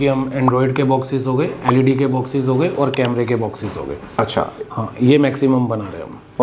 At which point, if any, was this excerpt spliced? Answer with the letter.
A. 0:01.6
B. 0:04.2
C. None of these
C